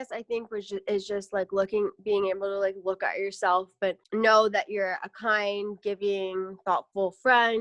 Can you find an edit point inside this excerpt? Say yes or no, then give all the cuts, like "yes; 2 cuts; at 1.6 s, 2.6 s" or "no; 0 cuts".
no; 0 cuts